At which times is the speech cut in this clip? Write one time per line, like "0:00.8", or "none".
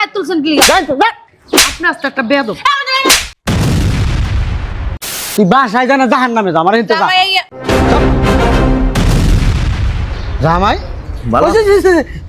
0:05.3